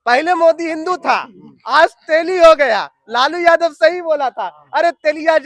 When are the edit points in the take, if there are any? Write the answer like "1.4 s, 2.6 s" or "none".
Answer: none